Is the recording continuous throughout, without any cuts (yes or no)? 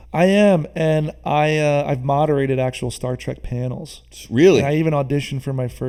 yes